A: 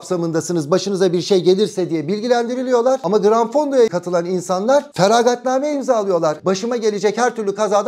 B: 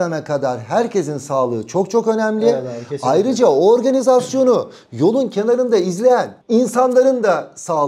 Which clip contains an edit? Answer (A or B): A